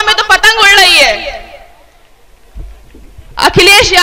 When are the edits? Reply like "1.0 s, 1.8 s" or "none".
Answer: 2.0 s

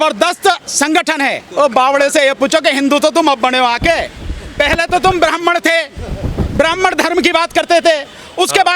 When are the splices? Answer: 1.4 s

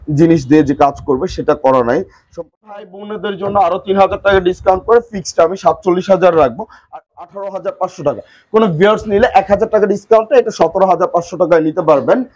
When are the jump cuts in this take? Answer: 2.4 s, 6.7 s

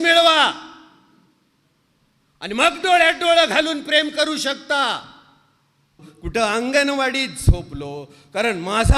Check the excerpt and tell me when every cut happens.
6.1 s

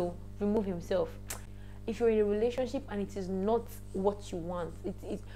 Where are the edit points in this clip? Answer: 1.5 s

